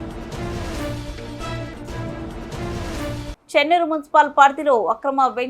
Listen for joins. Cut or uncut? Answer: cut